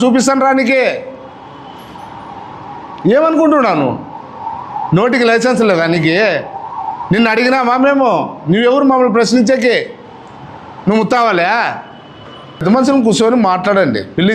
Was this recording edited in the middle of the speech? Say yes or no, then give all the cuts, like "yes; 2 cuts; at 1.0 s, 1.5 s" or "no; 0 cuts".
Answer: yes; 1 cut; at 12.6 s